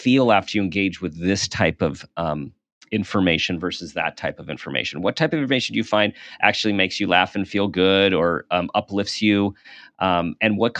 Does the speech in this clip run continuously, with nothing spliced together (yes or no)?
yes